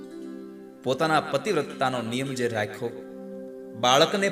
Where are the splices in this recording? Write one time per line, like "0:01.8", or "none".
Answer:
none